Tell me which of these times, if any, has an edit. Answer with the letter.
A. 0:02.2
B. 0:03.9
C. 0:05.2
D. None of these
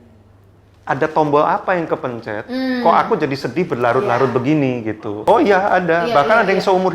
C